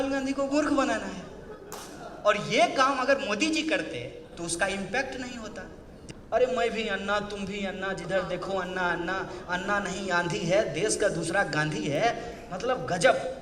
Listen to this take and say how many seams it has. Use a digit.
1